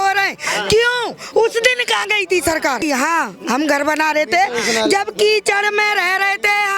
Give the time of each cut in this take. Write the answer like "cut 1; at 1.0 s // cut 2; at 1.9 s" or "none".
cut 1; at 2.8 s